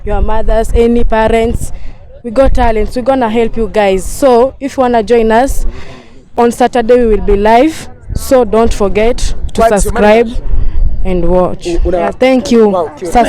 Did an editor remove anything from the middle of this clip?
yes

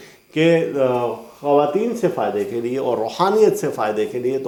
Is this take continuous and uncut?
yes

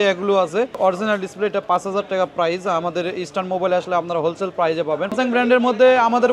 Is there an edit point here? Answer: yes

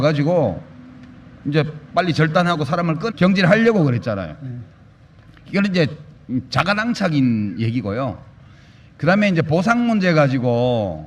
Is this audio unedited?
yes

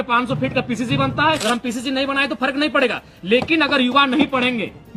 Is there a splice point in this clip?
yes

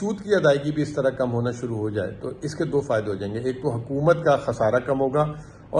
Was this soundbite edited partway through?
no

